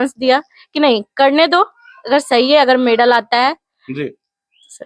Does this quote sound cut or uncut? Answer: uncut